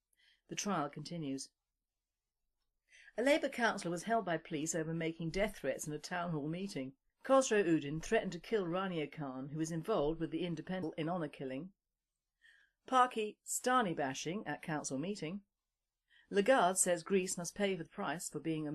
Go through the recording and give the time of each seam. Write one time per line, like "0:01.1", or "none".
none